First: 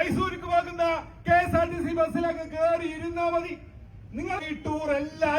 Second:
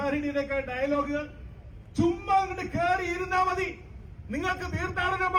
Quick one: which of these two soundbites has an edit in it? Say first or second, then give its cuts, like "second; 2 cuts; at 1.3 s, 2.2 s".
first; 1 cut; at 4.5 s